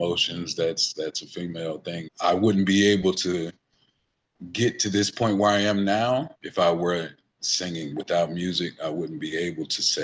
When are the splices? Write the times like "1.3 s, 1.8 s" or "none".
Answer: 2.1 s, 6.4 s, 7.9 s